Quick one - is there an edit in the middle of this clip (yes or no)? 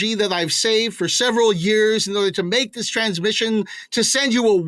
no